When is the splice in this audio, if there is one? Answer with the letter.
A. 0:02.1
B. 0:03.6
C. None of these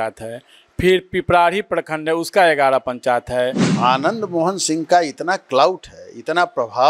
B